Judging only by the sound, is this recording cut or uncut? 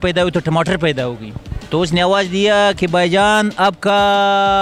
uncut